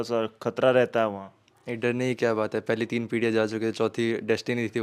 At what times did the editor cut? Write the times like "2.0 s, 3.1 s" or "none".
none